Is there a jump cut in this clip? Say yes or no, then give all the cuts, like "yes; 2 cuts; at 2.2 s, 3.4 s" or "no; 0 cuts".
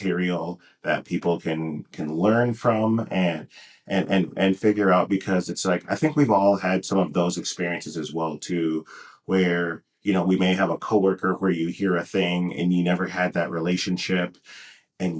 no; 0 cuts